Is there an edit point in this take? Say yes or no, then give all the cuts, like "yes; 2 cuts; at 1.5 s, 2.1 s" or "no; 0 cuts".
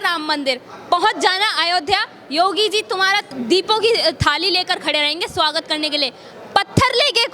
yes; 1 cut; at 3.3 s